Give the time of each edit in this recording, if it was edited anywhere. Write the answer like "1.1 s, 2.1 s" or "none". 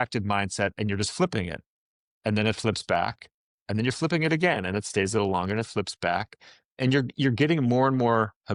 none